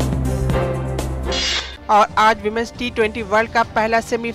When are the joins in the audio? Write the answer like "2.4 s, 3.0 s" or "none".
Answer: none

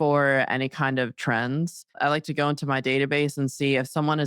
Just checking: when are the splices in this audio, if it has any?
2.0 s

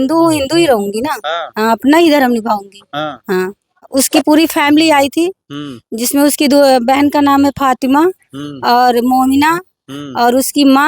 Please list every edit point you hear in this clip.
3.9 s

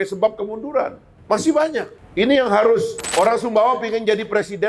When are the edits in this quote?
1.1 s, 2.0 s, 3.0 s

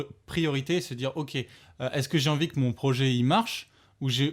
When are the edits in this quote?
none

